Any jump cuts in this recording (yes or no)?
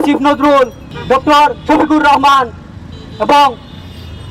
no